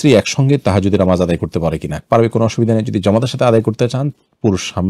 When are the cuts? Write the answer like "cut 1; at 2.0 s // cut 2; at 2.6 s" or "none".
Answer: none

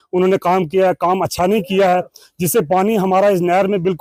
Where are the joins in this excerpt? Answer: none

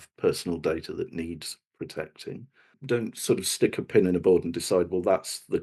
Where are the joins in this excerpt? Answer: cut 1; at 2.8 s

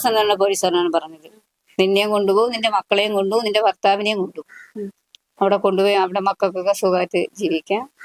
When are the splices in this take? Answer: none

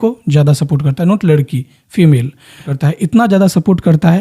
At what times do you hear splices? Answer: cut 1; at 2.6 s

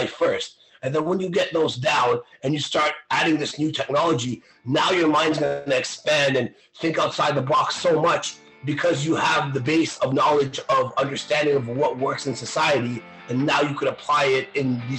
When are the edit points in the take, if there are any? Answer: none

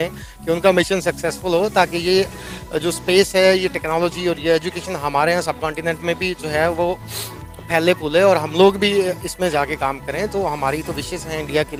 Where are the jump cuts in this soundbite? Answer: none

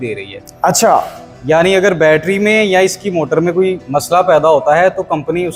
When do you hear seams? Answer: none

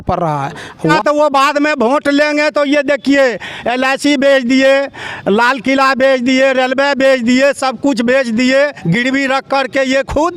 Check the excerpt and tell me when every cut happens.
cut 1; at 1.0 s

